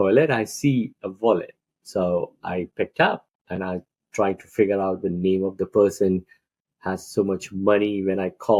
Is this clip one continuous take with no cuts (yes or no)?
yes